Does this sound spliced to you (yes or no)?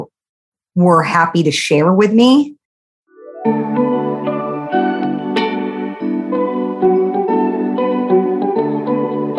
yes